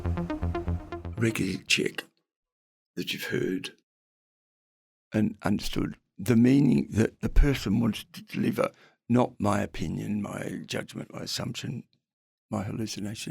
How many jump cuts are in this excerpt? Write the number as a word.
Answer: two